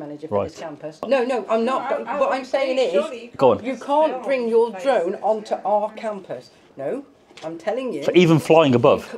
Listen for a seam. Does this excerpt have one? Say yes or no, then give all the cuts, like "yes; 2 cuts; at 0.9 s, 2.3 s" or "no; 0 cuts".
yes; 2 cuts; at 1.1 s, 6.7 s